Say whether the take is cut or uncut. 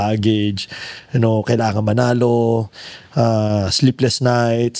uncut